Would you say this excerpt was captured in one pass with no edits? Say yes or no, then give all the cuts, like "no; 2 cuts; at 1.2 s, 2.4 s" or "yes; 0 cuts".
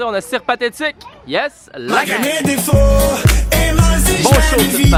yes; 0 cuts